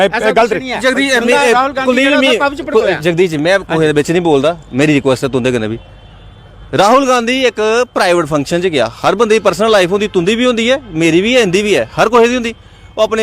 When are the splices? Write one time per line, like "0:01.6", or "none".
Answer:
none